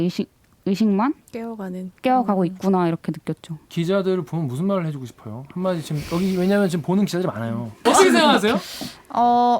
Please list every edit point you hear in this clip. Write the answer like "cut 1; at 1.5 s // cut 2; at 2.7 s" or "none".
cut 1; at 3.6 s // cut 2; at 7.8 s

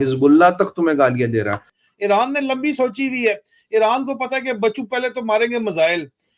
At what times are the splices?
cut 1; at 1.7 s

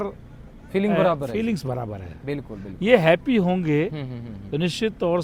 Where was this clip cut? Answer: none

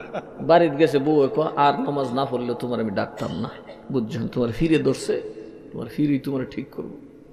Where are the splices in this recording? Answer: none

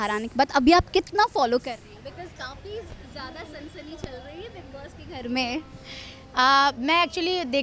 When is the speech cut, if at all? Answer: none

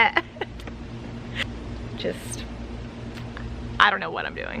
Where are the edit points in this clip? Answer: cut 1; at 1.4 s

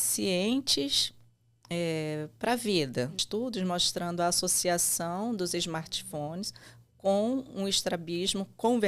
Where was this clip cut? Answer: cut 1; at 3.2 s

